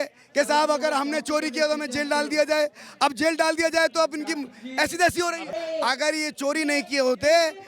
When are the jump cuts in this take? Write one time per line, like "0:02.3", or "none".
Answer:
0:05.5